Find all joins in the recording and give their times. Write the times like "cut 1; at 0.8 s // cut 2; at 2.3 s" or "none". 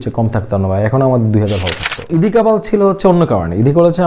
cut 1; at 2.1 s